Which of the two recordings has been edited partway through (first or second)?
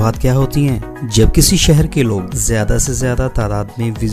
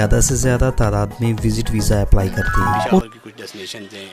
second